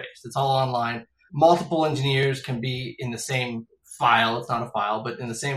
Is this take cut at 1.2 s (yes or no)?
yes